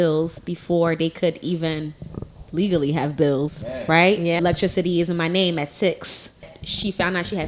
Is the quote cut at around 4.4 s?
yes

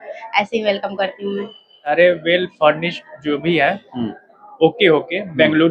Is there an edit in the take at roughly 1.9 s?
yes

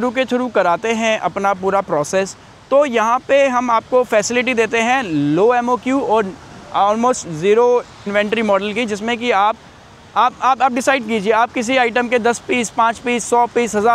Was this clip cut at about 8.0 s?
yes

